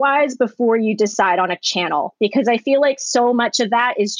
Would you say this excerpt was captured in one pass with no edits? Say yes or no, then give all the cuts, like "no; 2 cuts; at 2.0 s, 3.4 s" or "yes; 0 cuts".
yes; 0 cuts